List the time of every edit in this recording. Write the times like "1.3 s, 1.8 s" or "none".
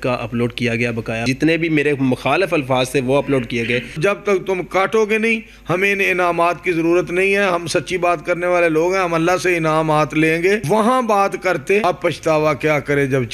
1.2 s, 4.0 s, 10.6 s, 11.8 s